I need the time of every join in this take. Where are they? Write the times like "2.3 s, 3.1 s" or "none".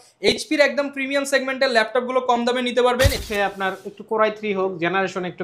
3.2 s